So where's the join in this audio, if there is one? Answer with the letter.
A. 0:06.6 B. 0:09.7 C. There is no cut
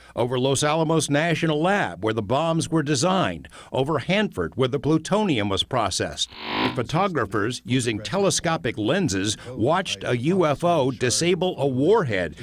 A